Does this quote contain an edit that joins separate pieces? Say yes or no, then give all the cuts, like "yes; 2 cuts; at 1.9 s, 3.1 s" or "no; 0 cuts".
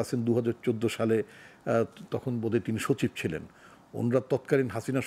no; 0 cuts